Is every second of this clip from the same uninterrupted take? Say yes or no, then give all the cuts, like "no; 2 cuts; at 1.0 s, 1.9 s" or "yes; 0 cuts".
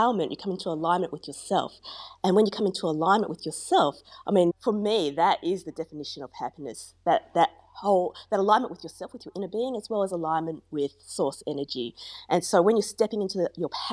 yes; 0 cuts